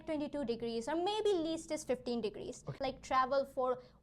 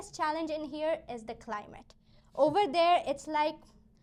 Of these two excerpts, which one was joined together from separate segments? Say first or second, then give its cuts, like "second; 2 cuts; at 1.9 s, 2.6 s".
first; 1 cut; at 2.8 s